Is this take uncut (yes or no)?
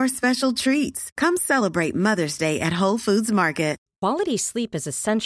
no